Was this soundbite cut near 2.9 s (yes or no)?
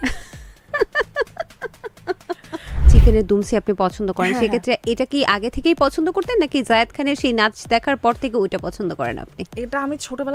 yes